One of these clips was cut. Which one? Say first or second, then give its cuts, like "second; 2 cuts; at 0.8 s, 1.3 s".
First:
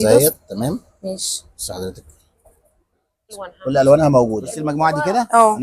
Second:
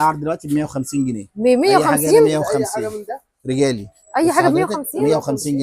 first; 2 cuts; at 3.5 s, 4.5 s